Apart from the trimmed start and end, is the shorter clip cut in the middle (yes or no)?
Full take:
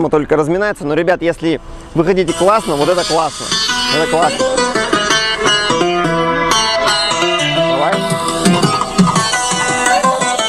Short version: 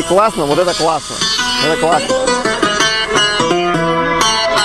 no